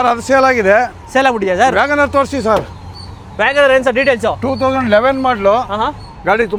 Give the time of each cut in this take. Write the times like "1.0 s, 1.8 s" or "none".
none